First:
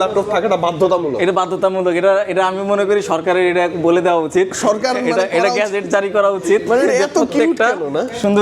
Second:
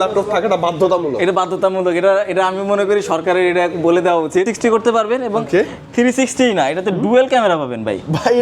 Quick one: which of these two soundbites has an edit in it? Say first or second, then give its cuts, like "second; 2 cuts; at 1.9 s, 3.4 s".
second; 1 cut; at 4.5 s